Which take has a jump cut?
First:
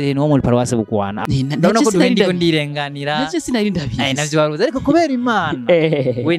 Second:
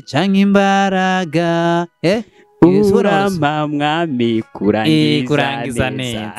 first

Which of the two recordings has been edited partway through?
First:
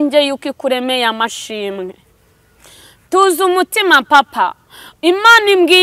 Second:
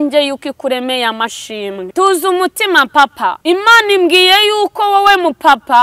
second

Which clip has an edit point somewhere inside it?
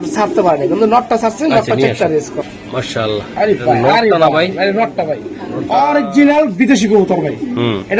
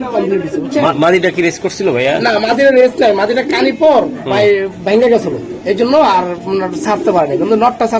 first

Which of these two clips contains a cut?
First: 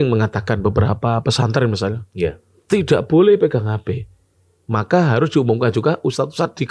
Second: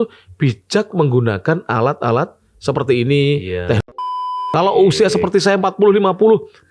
second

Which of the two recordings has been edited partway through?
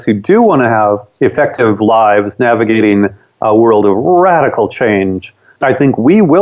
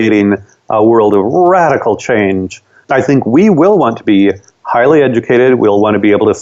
first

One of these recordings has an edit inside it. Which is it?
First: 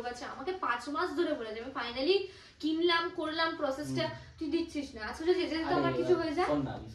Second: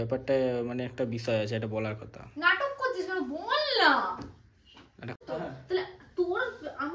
second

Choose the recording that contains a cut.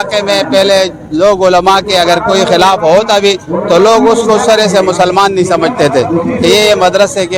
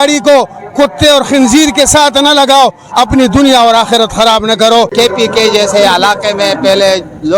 second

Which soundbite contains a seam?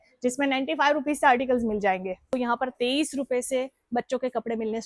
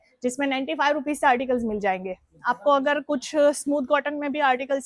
first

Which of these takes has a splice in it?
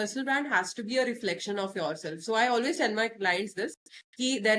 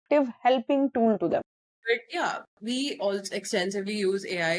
second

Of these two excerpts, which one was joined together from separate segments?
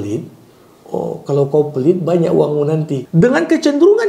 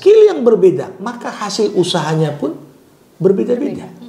first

